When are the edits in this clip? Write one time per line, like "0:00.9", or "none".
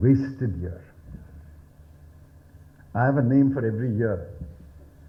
none